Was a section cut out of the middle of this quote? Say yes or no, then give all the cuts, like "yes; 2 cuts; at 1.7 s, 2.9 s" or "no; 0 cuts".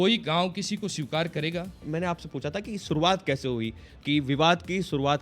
yes; 1 cut; at 1.8 s